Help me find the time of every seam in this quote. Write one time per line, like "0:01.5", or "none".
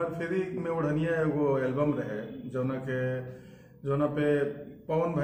none